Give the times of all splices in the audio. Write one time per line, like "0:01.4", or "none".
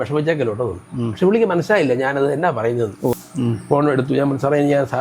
0:03.1